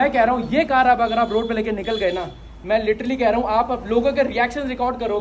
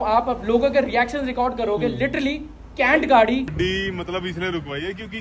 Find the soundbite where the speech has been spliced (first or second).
second